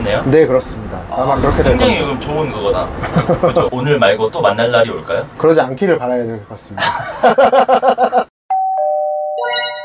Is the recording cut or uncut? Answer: cut